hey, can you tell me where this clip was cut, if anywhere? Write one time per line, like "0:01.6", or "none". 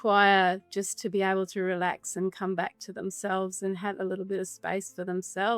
none